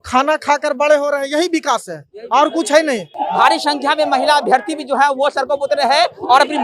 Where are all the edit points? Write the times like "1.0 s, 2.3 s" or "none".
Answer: 3.2 s